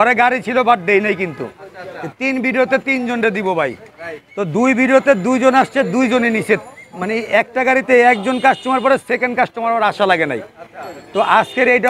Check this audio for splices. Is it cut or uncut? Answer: uncut